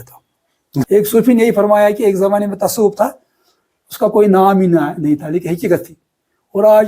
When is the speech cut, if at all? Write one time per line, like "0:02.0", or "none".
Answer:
0:00.9